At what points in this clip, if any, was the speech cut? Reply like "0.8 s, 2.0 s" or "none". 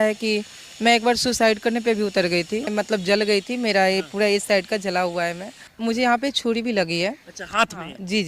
2.7 s, 5.6 s